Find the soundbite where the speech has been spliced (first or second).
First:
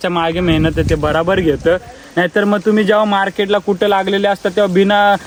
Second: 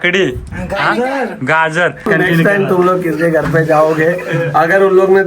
second